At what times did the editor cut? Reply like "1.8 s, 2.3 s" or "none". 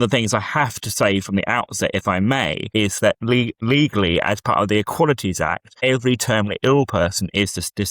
2.6 s, 3.6 s, 5.7 s